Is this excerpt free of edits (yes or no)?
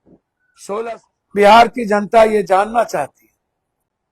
no